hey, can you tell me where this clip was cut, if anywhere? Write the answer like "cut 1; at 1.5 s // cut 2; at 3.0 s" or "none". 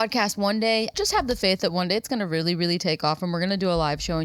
cut 1; at 0.9 s